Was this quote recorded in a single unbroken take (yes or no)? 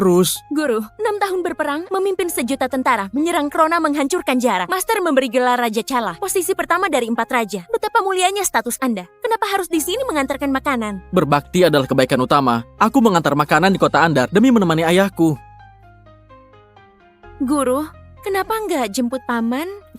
no